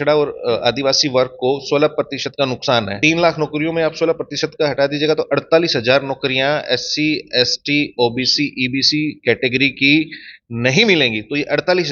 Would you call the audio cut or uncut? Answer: cut